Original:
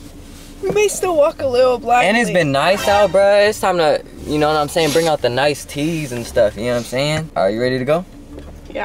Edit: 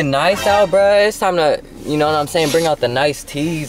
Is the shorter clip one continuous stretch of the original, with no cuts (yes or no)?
yes